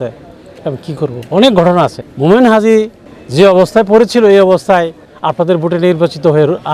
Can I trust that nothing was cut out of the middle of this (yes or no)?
yes